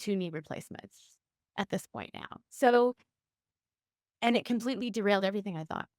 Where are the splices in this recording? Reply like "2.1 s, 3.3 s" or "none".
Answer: none